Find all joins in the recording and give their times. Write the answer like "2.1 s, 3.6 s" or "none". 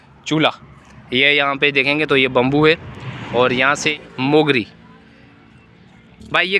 3.9 s